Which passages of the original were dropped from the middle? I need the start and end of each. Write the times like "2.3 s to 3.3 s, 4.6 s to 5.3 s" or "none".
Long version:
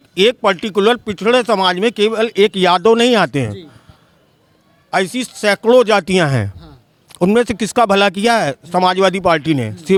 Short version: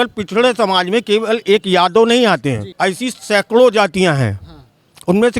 3.6 s to 4.8 s